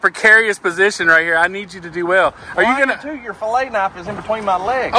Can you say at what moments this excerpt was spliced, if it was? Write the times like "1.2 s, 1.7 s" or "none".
none